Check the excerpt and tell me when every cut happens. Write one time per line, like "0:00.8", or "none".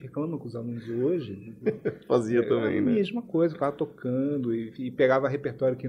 none